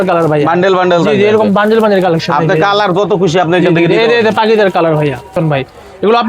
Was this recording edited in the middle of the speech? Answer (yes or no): yes